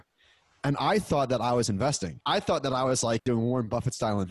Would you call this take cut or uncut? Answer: cut